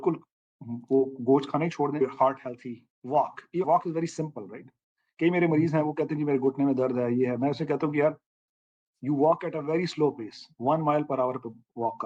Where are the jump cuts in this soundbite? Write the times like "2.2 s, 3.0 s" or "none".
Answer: 2.0 s